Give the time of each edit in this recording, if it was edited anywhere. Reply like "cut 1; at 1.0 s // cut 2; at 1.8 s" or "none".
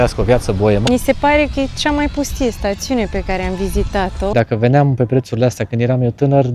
cut 1; at 0.8 s // cut 2; at 4.3 s